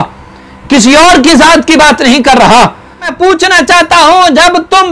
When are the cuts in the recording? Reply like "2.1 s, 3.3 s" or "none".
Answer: 3.1 s